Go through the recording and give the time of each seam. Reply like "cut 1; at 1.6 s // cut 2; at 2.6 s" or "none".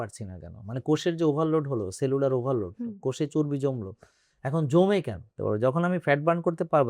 cut 1; at 5.4 s